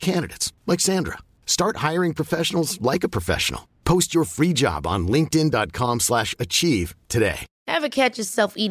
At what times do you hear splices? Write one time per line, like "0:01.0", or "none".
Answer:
0:07.5